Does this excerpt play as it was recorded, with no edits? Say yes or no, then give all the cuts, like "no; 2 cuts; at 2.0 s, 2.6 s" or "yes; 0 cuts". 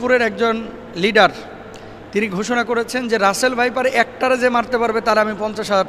yes; 0 cuts